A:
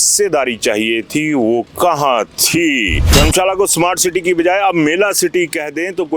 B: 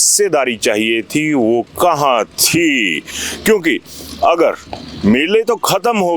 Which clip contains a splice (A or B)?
A